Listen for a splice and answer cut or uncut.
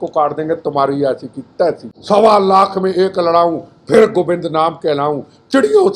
cut